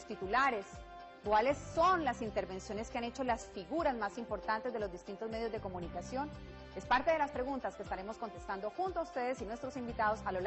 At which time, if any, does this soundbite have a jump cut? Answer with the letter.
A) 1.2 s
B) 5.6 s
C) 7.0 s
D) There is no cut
B